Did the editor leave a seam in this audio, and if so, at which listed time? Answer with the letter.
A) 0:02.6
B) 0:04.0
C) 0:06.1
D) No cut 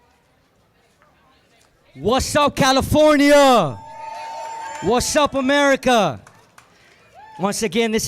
B